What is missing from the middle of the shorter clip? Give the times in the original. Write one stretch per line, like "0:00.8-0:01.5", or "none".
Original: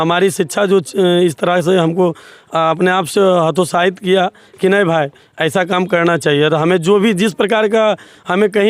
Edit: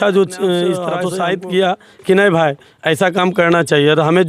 0:01.6-0:03.6